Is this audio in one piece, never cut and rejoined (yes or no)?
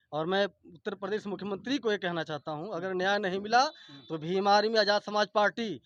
yes